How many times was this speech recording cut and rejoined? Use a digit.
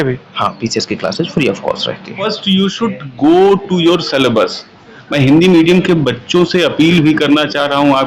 1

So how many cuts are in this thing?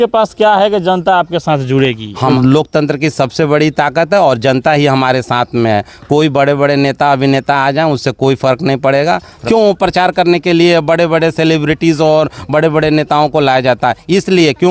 2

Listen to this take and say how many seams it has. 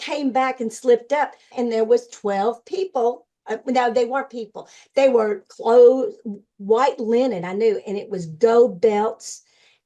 1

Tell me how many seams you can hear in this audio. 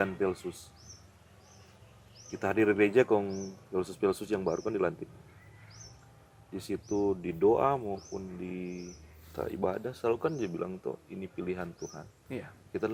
0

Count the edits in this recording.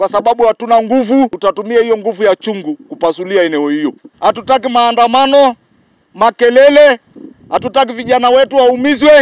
2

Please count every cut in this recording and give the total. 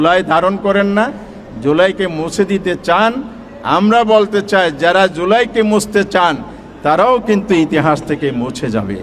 0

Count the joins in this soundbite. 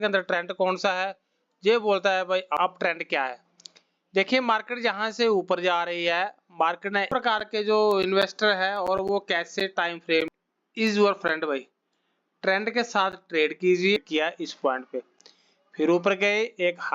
4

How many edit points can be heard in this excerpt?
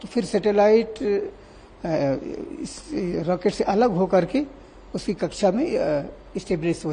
0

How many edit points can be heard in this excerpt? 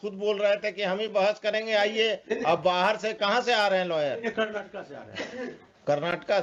0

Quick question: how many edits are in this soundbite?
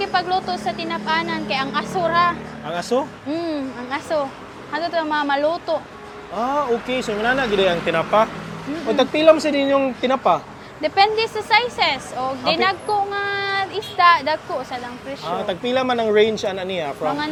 0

